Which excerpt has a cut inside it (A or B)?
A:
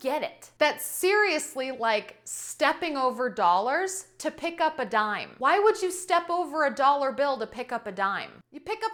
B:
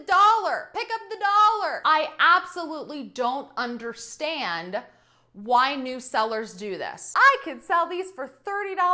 B